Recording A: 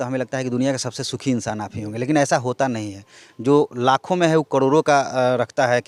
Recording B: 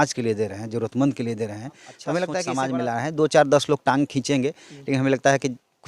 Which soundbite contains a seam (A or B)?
B